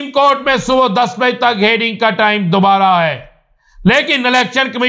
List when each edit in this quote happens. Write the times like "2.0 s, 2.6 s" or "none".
none